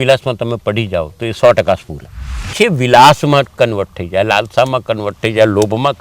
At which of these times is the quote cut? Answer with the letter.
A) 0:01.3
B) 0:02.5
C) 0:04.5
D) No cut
B